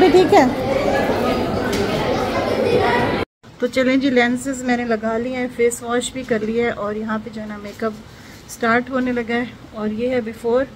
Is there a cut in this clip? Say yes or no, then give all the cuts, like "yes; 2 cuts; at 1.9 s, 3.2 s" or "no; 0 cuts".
yes; 1 cut; at 3.3 s